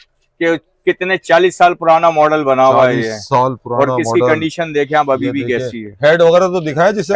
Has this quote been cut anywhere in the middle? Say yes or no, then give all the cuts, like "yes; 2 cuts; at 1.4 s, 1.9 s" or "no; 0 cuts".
no; 0 cuts